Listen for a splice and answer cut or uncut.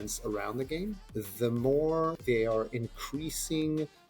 cut